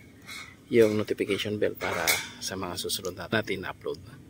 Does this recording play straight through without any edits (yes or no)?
no